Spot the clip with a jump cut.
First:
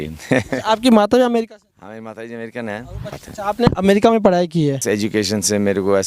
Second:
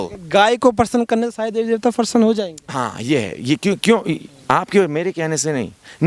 first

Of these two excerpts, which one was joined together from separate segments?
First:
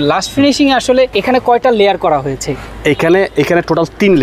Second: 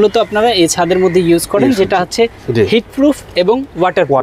first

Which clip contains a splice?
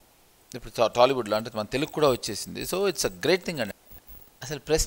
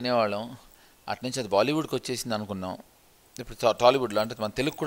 first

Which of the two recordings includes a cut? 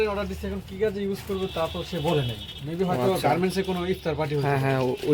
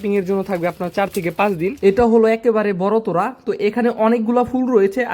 second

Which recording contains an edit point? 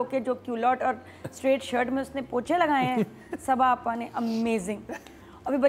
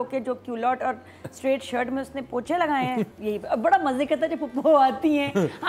second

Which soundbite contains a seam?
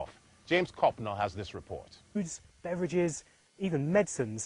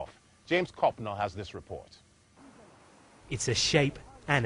second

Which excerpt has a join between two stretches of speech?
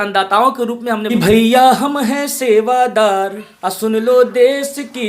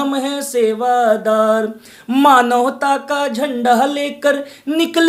first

